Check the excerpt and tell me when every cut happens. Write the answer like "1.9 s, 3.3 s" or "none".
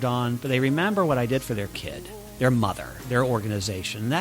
2.4 s, 3.0 s